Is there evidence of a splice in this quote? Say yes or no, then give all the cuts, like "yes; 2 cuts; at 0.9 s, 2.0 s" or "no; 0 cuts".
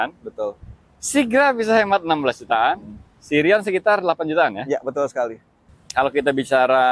yes; 1 cut; at 5.7 s